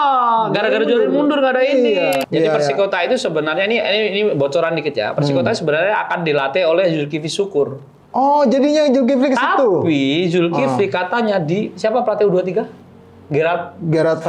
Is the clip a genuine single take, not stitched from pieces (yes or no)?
no